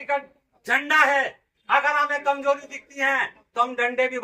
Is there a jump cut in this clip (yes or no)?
no